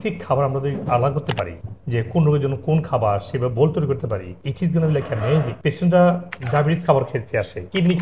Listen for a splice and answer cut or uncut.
cut